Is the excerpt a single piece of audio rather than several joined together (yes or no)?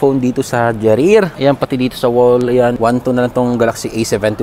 no